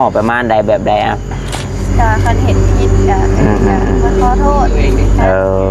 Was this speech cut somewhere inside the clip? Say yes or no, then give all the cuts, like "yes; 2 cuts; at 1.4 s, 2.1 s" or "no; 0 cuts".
yes; 1 cut; at 1.8 s